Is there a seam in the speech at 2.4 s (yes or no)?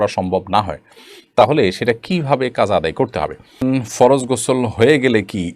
no